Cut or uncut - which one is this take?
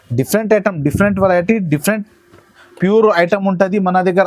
uncut